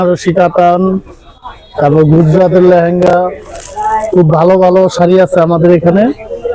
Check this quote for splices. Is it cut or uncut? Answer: uncut